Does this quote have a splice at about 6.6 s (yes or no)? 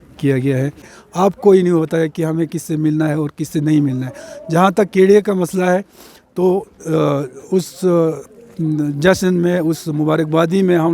no